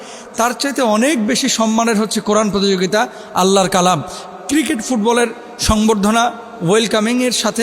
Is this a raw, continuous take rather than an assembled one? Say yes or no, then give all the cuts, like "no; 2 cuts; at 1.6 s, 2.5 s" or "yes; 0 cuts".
yes; 0 cuts